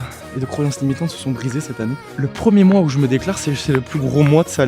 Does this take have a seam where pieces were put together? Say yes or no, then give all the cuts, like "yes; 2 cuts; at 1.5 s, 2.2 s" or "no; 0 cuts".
yes; 1 cut; at 2.1 s